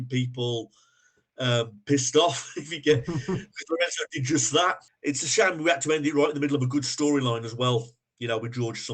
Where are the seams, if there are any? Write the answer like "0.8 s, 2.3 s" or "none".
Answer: 4.9 s